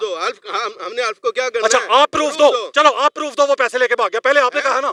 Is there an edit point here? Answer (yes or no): no